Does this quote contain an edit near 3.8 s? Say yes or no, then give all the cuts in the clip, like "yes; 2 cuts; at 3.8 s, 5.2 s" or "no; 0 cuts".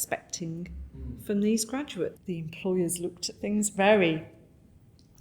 no; 1 cut; at 2.2 s